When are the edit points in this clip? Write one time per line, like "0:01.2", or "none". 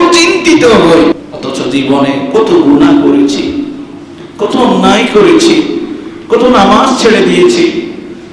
0:01.2